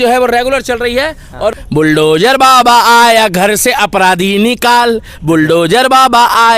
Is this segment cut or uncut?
cut